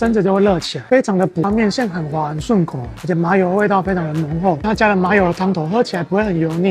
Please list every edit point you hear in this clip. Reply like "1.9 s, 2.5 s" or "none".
1.4 s, 4.6 s